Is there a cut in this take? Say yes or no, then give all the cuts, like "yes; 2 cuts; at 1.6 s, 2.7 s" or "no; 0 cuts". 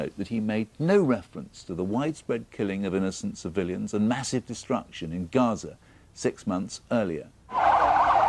yes; 1 cut; at 6.7 s